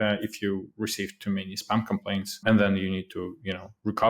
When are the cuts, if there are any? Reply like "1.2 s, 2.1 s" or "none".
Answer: 2.3 s